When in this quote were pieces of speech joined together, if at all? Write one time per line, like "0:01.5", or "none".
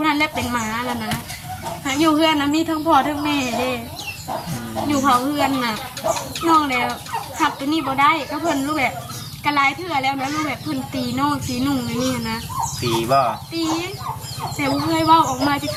none